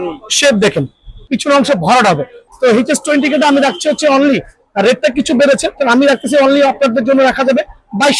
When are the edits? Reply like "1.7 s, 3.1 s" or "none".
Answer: 1.2 s, 2.4 s

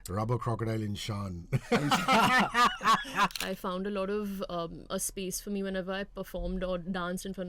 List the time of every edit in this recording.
3.4 s

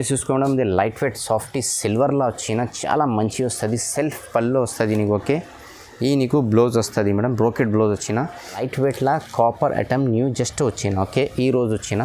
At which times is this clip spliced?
8.6 s

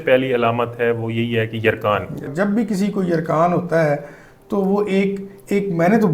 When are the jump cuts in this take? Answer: 2.3 s

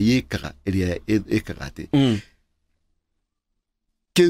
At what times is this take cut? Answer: none

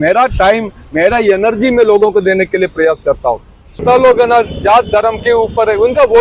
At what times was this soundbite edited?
3.8 s

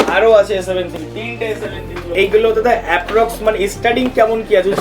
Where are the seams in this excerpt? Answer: 2.1 s

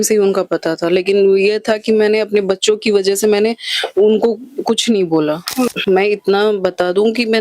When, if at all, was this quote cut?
5.8 s

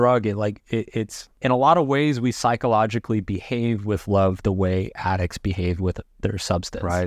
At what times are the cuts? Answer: 1.2 s

